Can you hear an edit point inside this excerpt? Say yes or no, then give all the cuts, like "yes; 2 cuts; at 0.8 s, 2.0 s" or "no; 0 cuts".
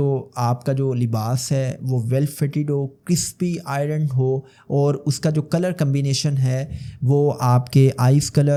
no; 0 cuts